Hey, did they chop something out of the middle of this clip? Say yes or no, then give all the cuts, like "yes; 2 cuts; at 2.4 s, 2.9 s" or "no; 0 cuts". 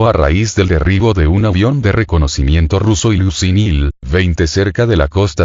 no; 0 cuts